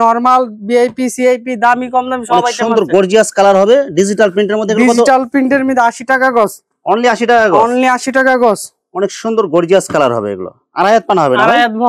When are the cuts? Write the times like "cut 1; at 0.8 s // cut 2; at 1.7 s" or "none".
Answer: none